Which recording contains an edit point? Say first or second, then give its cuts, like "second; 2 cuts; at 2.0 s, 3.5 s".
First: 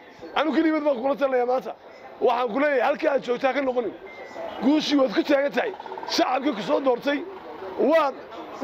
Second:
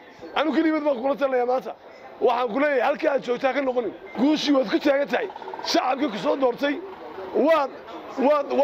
second; 1 cut; at 4.0 s